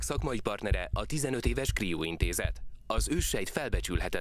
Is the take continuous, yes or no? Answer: yes